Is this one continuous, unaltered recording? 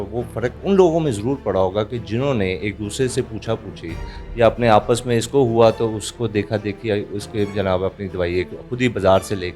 yes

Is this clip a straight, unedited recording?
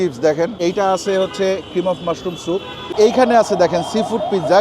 no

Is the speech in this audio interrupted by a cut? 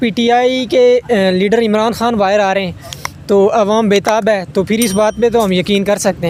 no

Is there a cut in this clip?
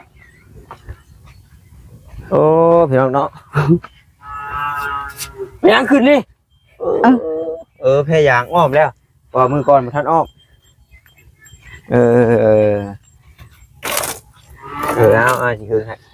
no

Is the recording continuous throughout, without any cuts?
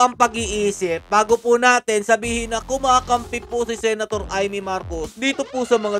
yes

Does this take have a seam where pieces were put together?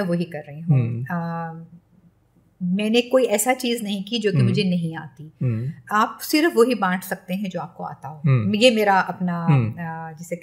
no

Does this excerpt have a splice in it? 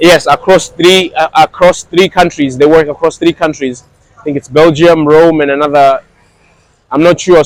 no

